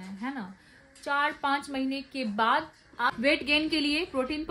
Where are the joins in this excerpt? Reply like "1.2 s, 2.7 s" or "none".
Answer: 3.2 s